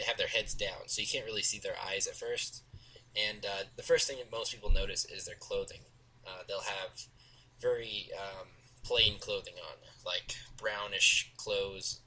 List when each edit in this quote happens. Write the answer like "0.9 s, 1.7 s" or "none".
none